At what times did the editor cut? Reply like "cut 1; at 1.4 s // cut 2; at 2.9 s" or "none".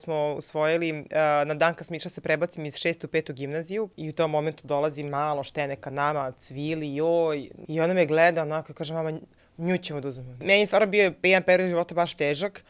cut 1; at 4.0 s // cut 2; at 7.5 s // cut 3; at 10.4 s